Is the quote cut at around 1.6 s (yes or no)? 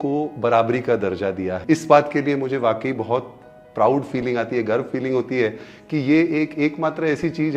yes